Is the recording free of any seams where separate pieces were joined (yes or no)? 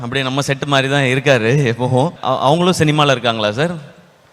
no